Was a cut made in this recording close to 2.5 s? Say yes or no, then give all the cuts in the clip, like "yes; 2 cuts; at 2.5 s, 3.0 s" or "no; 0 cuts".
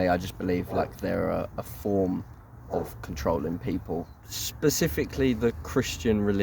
no; 1 cut; at 4.2 s